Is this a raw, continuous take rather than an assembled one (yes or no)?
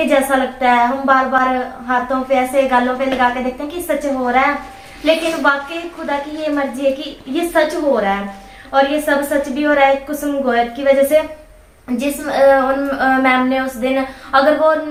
yes